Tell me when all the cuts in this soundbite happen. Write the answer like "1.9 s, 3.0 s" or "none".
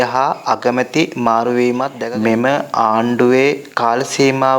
2.0 s